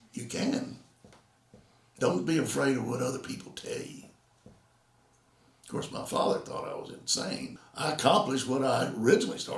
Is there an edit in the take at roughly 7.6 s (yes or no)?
yes